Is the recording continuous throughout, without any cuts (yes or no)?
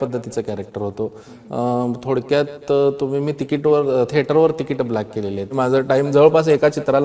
no